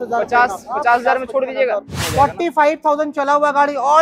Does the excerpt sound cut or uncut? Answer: cut